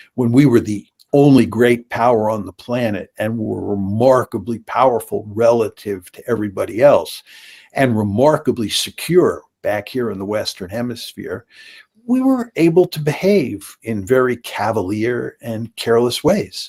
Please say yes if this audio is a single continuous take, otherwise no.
yes